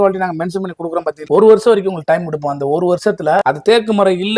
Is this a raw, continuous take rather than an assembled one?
no; 2 cuts; at 1.2 s, 3.4 s

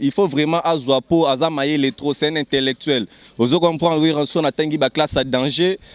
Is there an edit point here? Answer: no; 0 cuts

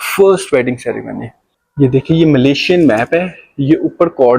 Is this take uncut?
no; 1 cut; at 1.6 s

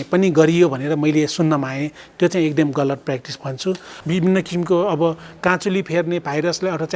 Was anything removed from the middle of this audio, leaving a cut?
yes; 1 cut; at 3.9 s

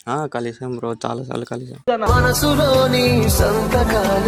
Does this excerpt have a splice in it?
no; 0 cuts

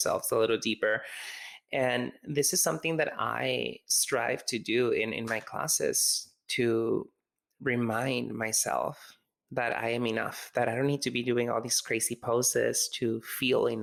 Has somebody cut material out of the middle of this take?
no; 0 cuts

